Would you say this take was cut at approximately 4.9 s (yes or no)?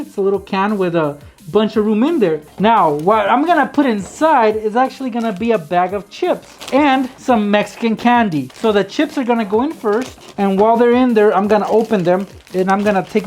no